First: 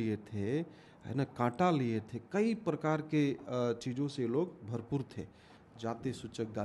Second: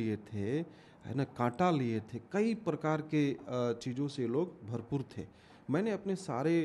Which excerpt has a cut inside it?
first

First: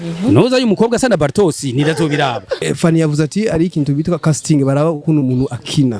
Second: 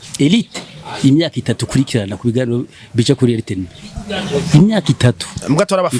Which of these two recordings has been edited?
first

